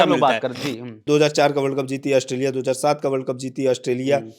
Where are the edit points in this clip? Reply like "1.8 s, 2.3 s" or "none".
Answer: 1.1 s